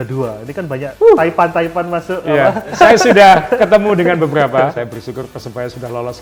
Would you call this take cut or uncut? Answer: cut